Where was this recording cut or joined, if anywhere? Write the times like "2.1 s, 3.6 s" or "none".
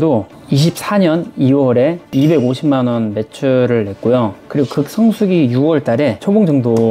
none